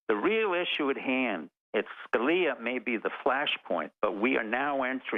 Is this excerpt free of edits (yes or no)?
yes